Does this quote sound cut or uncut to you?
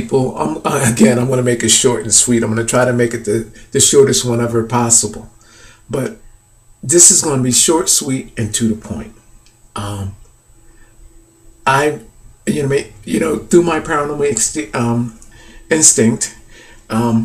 cut